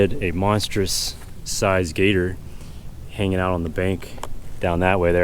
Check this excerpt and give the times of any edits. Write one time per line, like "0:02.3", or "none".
none